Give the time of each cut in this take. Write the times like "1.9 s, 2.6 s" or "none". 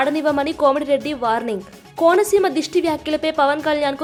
none